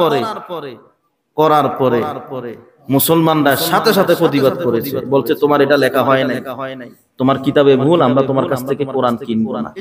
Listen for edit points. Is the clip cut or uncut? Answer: uncut